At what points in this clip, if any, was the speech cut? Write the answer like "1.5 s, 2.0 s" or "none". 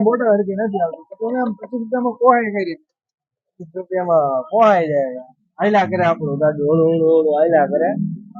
none